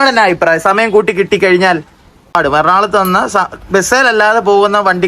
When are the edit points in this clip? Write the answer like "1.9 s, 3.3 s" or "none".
2.3 s